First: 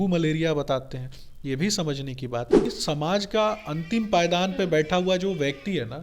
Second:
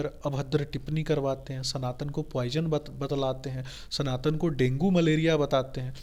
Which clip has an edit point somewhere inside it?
first; 1 cut; at 2.7 s

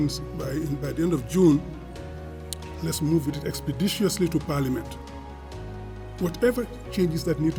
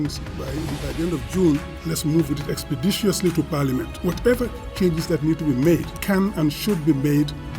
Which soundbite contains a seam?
second; 3 cuts; at 1.7 s, 3.9 s, 5.9 s

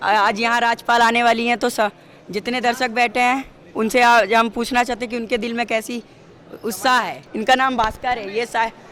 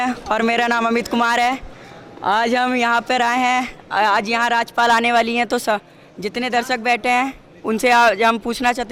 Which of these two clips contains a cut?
first; 1 cut; at 7.3 s

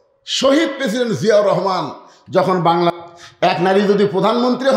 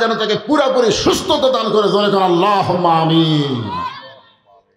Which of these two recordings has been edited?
first; 1 cut; at 3.0 s

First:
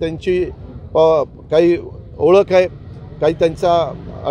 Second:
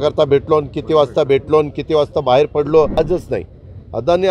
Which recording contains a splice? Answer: second; 1 cut; at 3.0 s

